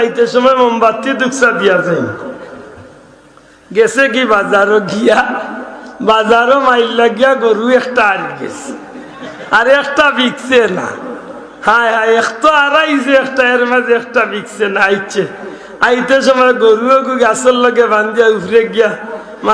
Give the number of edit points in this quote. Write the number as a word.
zero